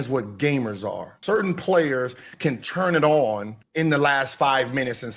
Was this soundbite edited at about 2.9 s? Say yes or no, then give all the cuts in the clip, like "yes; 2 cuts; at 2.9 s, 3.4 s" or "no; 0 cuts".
no; 1 cut; at 1.2 s